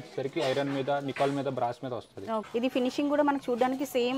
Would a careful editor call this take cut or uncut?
cut